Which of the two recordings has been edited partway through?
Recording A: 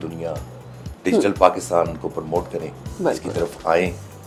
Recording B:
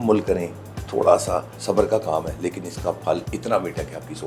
B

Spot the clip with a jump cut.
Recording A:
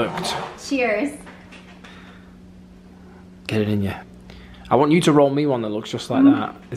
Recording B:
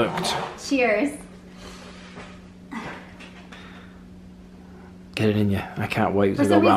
A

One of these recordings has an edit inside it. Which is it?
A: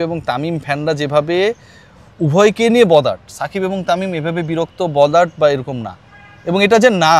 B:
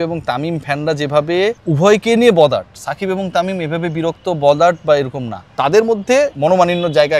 B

